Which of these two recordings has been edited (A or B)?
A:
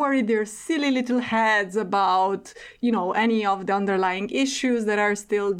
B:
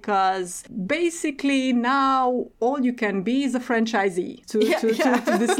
B